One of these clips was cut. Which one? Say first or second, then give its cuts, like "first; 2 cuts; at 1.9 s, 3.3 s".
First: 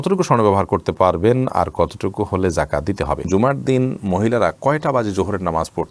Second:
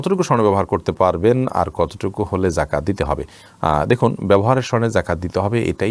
first; 1 cut; at 3.3 s